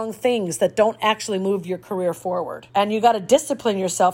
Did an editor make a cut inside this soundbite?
yes; 1 cut; at 2.6 s

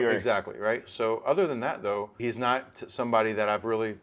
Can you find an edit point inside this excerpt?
yes; 1 cut; at 2.1 s

